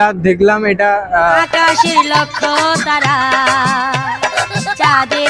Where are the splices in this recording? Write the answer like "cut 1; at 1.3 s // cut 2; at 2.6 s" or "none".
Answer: cut 1; at 1.4 s